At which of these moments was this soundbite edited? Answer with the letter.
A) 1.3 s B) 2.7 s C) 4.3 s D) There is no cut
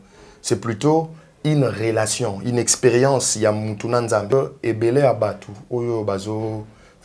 C